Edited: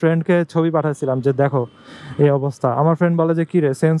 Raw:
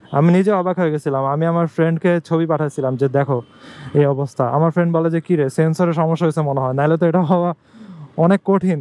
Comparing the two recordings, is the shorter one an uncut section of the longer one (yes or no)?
yes